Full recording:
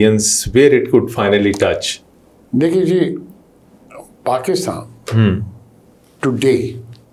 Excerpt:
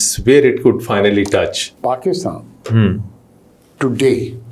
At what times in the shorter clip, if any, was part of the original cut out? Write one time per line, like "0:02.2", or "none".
0:01.7

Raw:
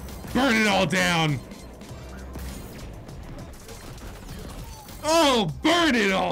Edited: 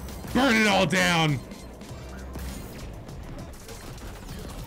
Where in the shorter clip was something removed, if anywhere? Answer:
none

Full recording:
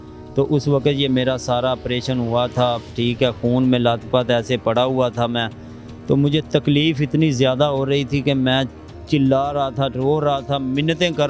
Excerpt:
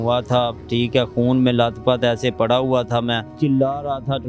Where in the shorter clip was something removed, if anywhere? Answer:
0:03.3

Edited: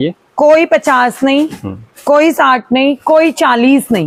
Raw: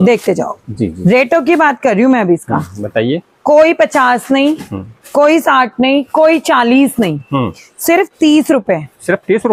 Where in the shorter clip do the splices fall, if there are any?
none

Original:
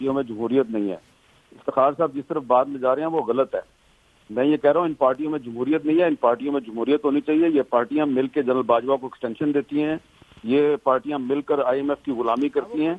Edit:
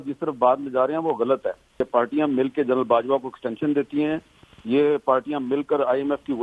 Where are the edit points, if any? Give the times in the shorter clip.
0:01.9

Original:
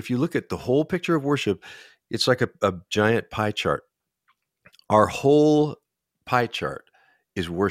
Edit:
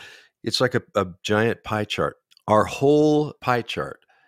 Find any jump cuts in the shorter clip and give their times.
0:02.3
0:03.4

